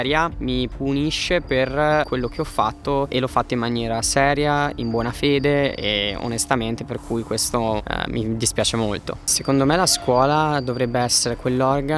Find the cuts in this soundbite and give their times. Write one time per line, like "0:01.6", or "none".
0:09.3